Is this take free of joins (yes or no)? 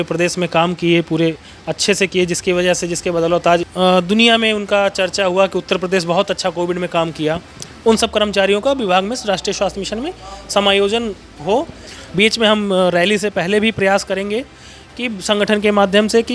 no